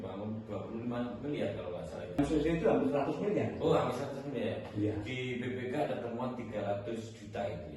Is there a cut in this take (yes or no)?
yes